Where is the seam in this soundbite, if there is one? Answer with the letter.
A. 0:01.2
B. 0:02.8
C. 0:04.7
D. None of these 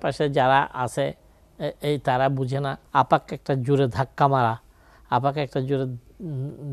B